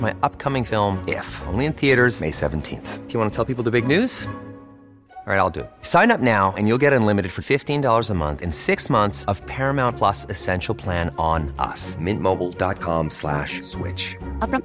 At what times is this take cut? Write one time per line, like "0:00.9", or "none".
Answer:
none